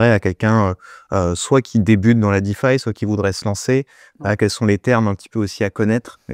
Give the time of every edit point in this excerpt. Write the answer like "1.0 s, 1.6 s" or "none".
none